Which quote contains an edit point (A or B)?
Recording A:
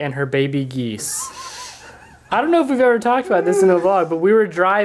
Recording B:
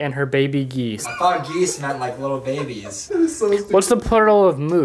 B